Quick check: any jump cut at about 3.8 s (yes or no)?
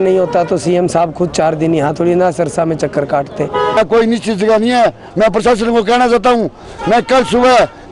yes